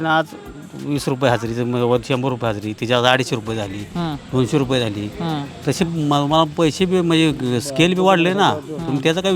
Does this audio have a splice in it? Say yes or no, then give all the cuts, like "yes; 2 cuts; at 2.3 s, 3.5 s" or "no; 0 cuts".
no; 0 cuts